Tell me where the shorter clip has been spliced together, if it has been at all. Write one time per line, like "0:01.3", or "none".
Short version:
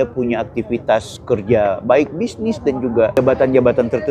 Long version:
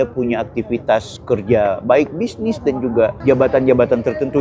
0:03.2